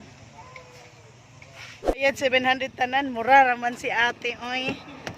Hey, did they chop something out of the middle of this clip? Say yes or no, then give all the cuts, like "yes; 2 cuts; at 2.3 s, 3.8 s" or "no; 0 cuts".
yes; 1 cut; at 1.8 s